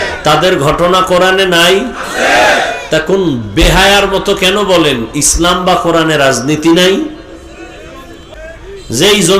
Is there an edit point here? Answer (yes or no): yes